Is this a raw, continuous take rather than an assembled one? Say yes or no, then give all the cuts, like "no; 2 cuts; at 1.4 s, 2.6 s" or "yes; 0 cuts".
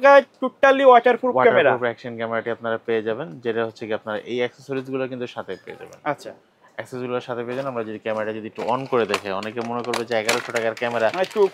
yes; 0 cuts